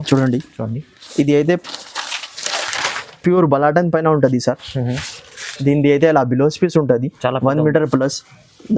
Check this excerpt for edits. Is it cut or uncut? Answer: uncut